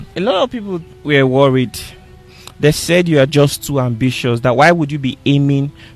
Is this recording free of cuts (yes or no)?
no